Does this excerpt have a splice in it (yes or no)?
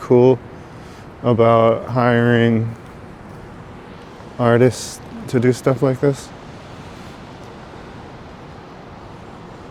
no